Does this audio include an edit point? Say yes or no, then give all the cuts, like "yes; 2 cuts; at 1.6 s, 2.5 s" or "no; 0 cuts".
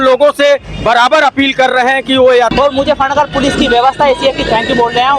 yes; 1 cut; at 2.5 s